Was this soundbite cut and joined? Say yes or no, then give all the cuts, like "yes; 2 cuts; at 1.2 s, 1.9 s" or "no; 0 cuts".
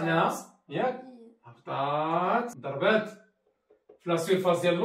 yes; 1 cut; at 2.6 s